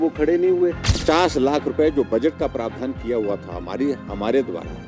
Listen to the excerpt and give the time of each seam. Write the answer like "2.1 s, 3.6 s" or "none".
1.0 s